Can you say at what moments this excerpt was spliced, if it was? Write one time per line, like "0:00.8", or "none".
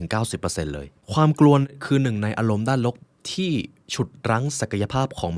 0:00.9